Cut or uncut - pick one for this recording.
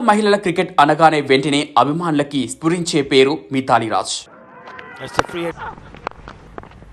uncut